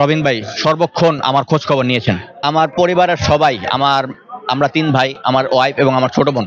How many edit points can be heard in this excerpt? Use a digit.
1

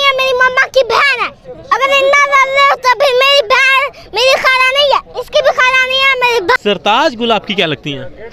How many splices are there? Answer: 2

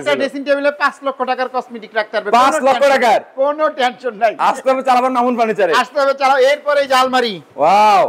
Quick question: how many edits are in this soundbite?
0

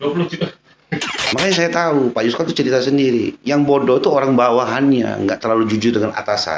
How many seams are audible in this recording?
1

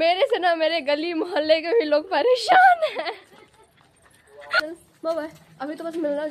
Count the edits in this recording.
1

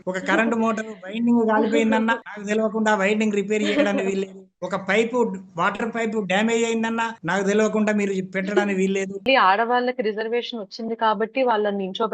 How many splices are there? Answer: 1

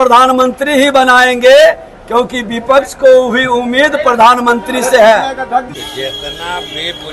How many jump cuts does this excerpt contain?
1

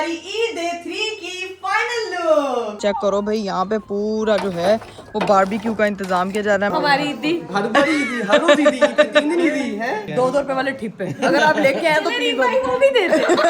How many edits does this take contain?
3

